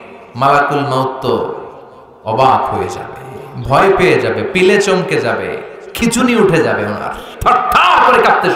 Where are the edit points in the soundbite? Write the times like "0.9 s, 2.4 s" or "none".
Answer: 7.3 s

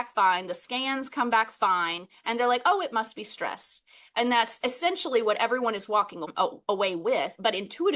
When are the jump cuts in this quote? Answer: 6.3 s

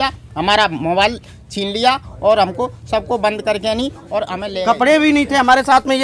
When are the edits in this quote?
4.4 s

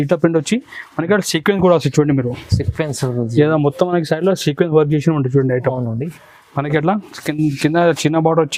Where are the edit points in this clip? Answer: none

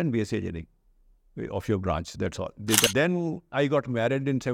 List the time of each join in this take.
2.9 s

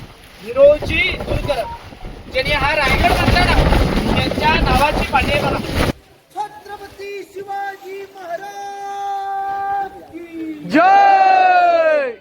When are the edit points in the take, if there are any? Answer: 5.9 s

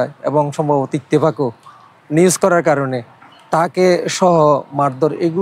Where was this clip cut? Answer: none

